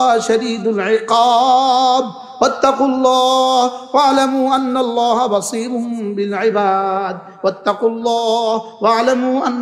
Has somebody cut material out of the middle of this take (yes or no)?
no